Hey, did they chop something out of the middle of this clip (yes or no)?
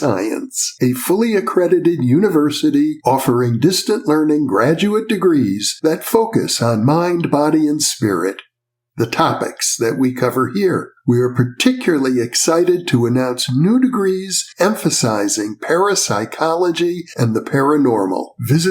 no